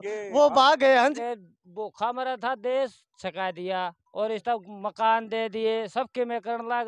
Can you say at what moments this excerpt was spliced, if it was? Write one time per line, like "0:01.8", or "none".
0:01.0